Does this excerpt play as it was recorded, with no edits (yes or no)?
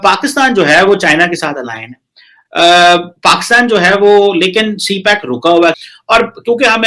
yes